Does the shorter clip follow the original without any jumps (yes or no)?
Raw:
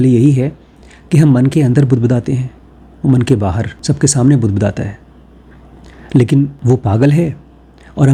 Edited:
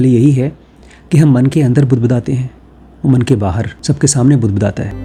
yes